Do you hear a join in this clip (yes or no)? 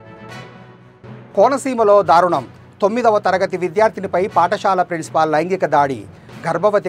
yes